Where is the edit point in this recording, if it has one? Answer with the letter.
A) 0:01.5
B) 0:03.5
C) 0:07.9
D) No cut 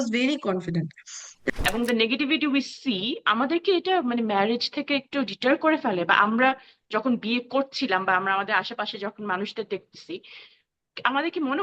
A